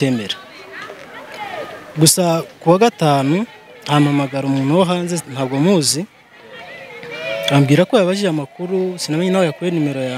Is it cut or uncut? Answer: uncut